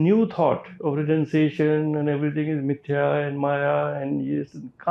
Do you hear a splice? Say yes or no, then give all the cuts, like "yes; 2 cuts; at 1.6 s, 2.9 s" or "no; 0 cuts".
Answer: no; 0 cuts